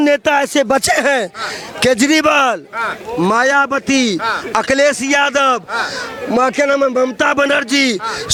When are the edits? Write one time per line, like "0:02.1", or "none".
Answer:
none